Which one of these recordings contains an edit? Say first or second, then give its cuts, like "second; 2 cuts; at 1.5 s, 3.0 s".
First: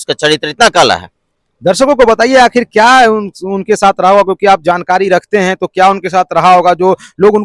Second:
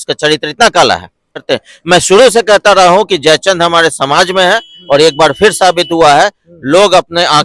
second; 1 cut; at 1.4 s